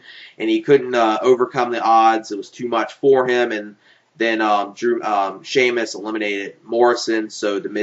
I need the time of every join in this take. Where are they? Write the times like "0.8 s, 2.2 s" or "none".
2.2 s